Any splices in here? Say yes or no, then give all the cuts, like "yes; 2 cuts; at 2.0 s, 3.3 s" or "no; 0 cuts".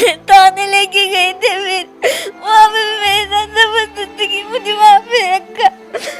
no; 0 cuts